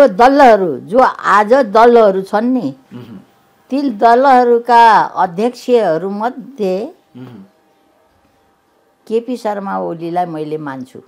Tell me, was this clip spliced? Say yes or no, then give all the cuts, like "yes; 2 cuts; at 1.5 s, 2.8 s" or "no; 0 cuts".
no; 0 cuts